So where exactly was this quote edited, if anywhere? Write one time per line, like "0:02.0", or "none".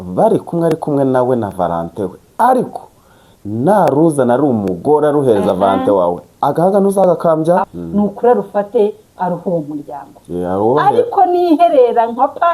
0:07.7